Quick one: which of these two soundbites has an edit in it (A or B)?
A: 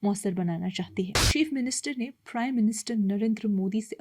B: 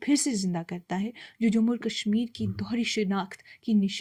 A